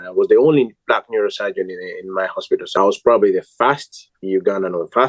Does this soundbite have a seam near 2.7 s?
yes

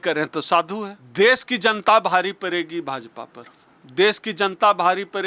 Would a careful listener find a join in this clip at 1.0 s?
yes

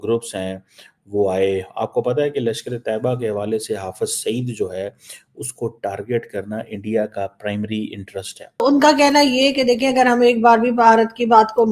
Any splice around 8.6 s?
yes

